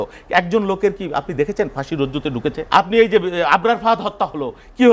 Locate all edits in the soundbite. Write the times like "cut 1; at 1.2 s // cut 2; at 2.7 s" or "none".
cut 1; at 2.6 s